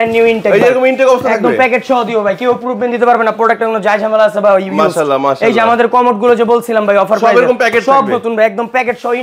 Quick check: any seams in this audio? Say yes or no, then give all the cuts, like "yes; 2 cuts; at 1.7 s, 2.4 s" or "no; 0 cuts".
no; 0 cuts